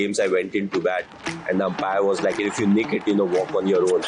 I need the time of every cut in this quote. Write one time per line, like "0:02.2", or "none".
none